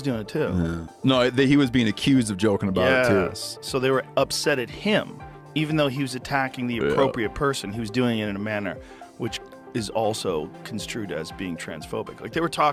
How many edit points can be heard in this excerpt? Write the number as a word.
zero